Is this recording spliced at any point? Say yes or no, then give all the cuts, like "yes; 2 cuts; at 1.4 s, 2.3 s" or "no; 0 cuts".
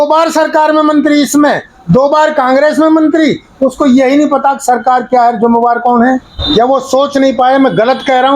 yes; 1 cut; at 6.3 s